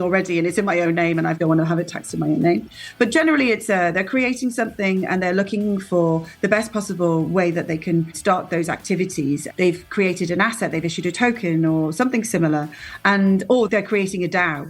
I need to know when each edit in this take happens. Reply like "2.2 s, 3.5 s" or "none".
1.4 s, 8.2 s, 9.5 s, 13.7 s